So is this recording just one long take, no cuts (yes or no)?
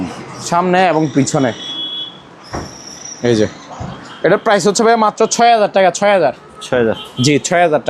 yes